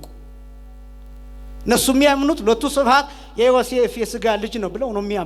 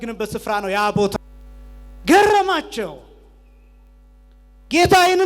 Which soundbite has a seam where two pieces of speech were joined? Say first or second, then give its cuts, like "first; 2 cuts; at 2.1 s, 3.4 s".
second; 1 cut; at 1.1 s